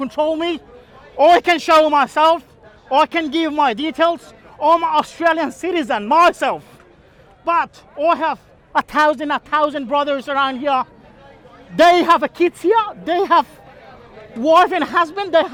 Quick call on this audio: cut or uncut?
uncut